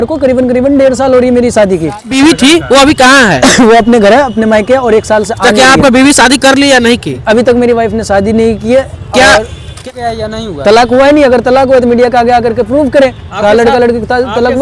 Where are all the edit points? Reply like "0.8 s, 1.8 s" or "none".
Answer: 2.1 s, 9.8 s